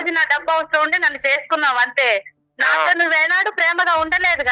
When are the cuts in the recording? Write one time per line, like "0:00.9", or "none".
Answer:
none

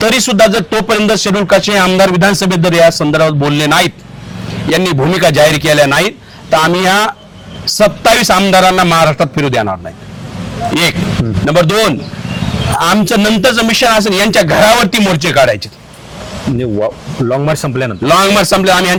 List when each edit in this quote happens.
none

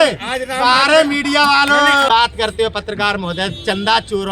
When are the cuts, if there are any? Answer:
0:02.1

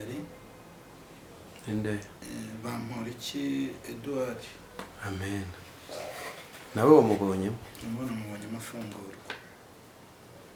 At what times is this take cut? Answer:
none

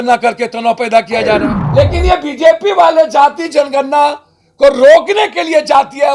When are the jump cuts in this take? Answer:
0:01.6

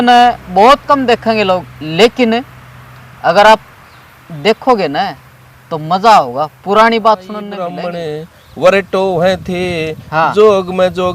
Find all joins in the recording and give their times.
0:07.6

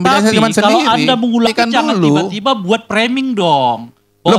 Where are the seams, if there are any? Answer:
0:01.5

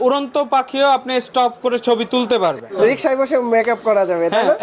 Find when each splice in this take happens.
0:02.6

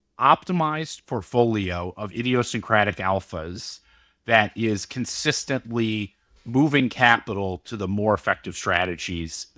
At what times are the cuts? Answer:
none

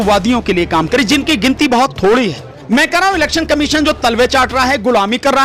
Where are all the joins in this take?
0:02.5

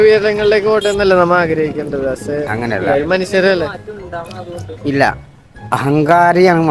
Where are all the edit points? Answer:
0:03.9

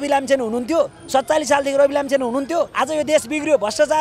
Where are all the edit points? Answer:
0:02.7

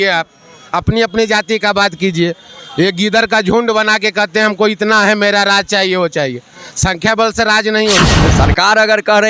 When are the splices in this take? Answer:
0:08.2

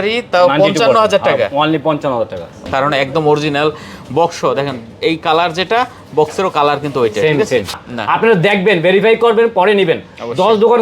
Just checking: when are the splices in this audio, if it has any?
0:02.6
0:07.9

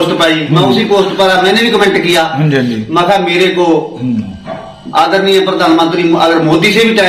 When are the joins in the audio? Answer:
none

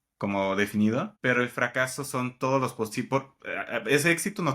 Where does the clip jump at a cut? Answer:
0:01.1

